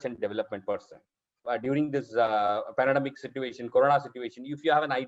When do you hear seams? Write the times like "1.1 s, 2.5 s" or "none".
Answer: 1.3 s